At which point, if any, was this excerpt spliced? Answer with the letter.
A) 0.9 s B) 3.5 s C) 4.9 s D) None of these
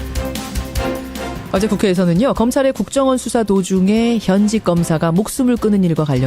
A